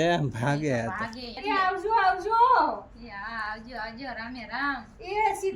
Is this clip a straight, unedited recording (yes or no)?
no